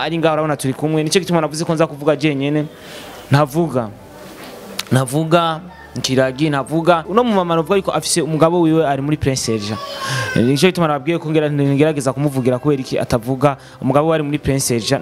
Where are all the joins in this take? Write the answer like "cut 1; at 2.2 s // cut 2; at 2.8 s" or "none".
cut 1; at 7.0 s